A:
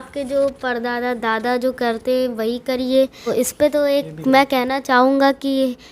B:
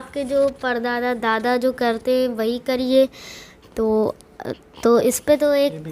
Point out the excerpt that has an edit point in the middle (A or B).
A